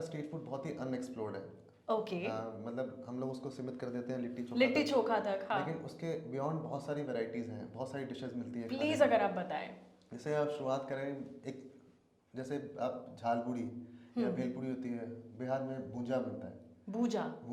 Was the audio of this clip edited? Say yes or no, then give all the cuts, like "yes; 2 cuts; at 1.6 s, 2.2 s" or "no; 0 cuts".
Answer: no; 0 cuts